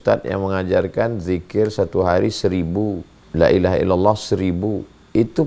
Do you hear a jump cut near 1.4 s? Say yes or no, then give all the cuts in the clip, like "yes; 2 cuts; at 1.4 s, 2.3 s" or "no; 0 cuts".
no; 1 cut; at 3.1 s